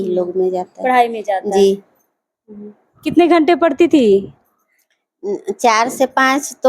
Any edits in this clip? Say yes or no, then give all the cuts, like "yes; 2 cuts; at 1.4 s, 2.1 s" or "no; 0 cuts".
no; 0 cuts